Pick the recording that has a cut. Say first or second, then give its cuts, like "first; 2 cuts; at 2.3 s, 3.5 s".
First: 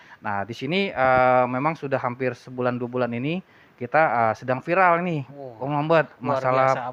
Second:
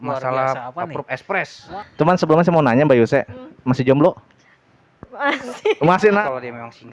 second; 2 cuts; at 1.7 s, 6.2 s